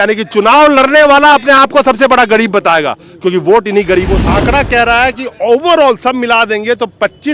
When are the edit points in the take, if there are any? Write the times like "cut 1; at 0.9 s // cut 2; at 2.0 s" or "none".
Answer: cut 1; at 4.2 s